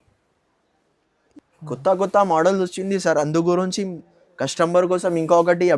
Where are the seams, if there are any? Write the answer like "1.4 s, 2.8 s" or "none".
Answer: 1.2 s